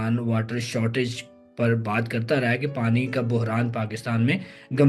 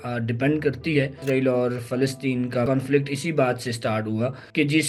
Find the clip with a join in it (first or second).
second